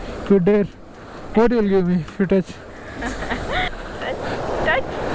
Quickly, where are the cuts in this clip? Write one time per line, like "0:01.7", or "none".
0:03.7